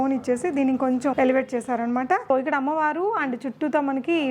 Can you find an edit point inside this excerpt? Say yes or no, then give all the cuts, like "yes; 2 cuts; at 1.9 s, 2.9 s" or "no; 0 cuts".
yes; 2 cuts; at 1.1 s, 2.2 s